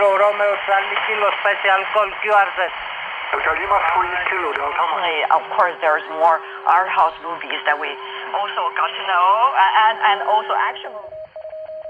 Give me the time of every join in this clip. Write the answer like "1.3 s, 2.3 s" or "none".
5.0 s, 10.9 s